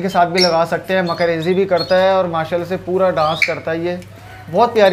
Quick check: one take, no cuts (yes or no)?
yes